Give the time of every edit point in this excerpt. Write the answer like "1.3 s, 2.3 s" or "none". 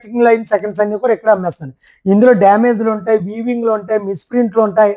none